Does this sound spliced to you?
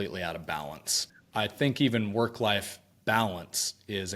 yes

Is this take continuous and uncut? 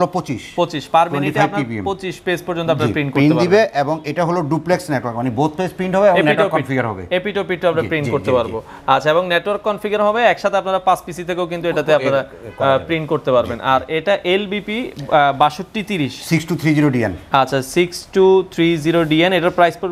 yes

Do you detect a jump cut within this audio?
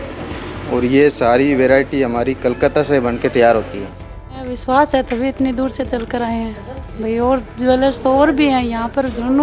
yes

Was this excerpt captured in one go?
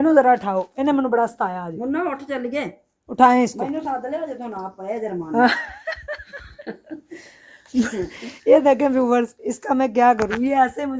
yes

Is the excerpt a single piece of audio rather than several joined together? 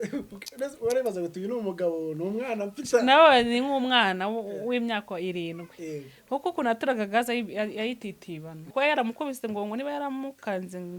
no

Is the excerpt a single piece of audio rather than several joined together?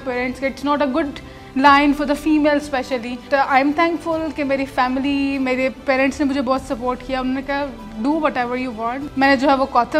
no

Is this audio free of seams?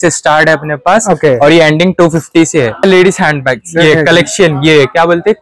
no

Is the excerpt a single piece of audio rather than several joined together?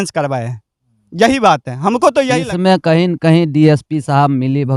no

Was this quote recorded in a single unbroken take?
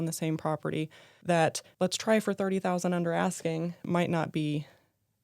no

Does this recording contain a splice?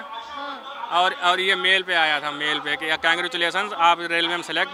no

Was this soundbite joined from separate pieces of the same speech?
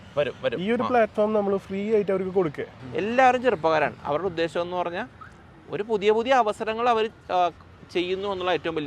yes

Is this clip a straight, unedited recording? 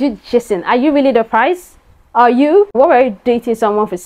no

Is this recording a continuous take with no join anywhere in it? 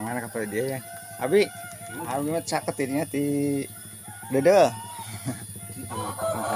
yes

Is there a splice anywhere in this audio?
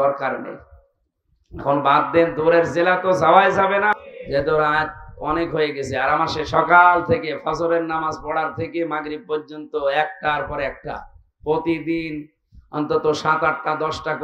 yes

